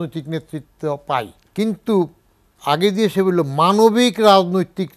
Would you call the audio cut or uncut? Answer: cut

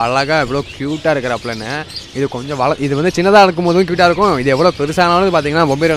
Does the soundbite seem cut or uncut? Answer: uncut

